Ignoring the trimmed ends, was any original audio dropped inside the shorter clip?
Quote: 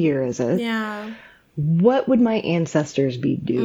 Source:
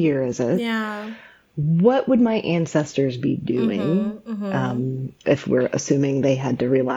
no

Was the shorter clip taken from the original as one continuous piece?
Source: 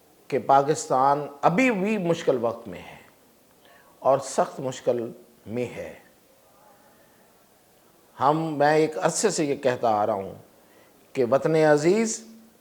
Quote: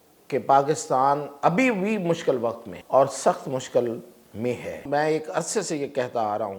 no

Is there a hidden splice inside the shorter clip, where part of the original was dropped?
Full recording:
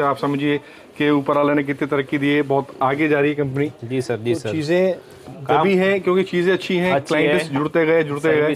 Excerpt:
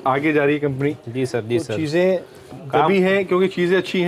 no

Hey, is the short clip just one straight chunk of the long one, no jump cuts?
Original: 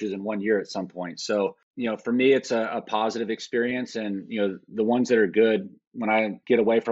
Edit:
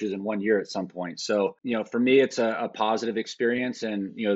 no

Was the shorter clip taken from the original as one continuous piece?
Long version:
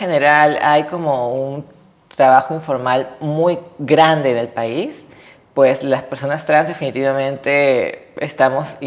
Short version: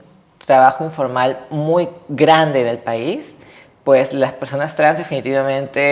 yes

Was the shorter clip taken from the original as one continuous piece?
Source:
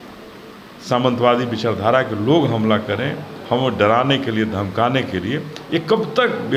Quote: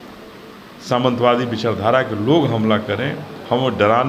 yes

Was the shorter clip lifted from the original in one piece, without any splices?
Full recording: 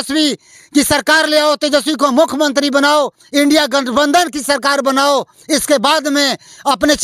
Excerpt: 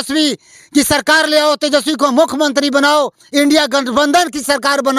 yes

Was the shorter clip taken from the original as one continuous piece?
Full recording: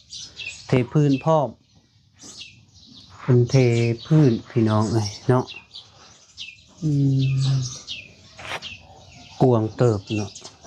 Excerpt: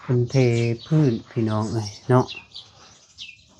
yes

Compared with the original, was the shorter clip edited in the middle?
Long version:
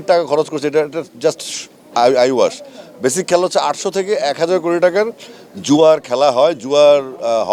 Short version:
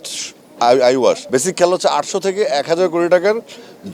yes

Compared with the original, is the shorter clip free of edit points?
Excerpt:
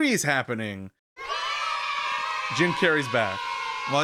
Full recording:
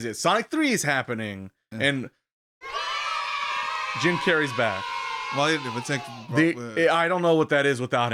no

